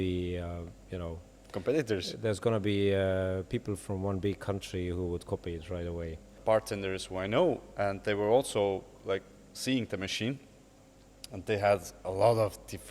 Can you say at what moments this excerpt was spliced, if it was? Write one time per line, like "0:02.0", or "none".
0:06.4